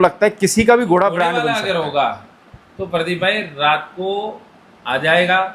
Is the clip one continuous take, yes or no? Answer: no